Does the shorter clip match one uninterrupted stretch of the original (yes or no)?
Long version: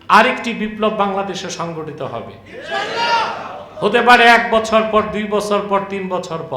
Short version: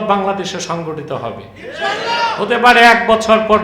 no